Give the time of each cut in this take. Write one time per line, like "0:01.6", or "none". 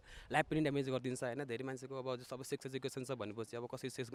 none